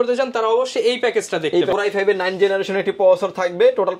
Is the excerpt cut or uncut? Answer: cut